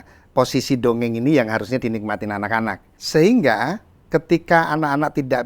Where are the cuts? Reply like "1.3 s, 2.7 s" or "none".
2.9 s